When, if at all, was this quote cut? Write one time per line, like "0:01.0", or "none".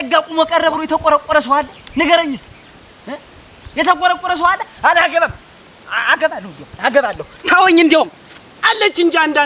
0:08.4